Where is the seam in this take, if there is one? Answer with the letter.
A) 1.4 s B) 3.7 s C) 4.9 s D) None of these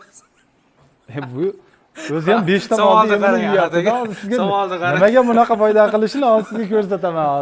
D